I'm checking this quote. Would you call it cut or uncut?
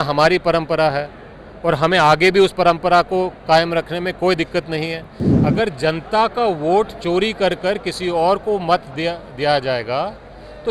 cut